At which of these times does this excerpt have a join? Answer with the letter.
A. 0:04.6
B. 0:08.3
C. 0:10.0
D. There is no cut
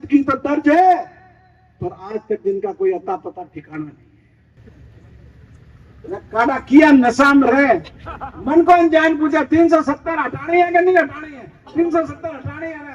A